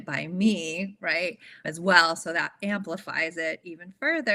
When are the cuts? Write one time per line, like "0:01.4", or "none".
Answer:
none

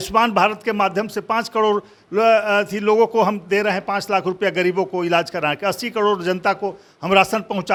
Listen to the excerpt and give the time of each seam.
none

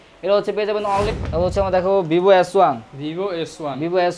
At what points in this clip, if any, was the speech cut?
0:01.1

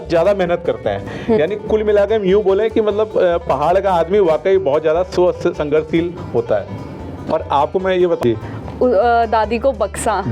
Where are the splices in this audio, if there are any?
0:08.2

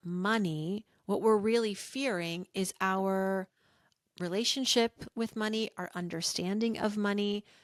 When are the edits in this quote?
none

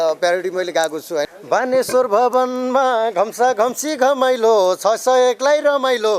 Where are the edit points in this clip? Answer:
0:01.3

